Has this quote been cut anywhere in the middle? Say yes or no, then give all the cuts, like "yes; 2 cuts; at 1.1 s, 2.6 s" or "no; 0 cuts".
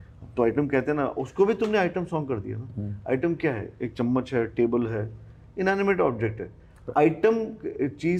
no; 0 cuts